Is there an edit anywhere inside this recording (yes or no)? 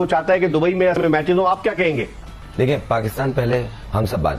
yes